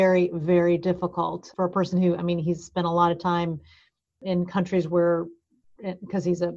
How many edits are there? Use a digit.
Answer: 2